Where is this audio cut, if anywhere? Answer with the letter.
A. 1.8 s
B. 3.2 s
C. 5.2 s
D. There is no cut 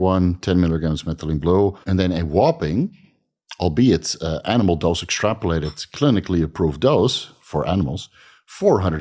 A